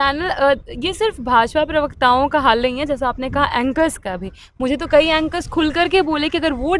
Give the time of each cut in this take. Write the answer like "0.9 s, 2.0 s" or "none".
none